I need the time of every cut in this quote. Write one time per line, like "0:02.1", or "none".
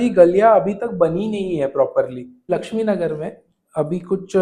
0:02.5